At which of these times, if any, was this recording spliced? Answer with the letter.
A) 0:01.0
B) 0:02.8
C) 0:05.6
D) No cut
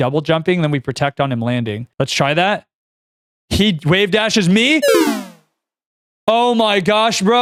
D